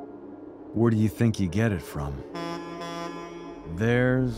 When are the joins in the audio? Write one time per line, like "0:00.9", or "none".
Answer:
none